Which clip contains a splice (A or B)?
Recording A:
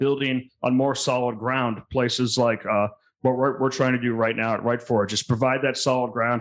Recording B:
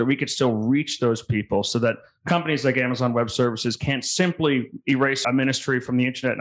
B